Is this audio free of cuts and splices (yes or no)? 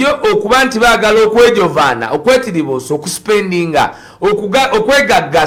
yes